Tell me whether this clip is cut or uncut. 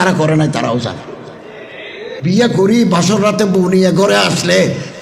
cut